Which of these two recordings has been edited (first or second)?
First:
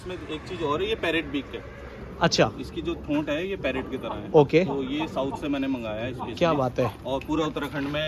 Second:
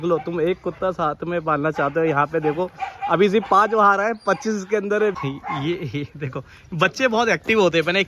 second